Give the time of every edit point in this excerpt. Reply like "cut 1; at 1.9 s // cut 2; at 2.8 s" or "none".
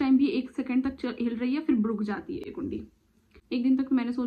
none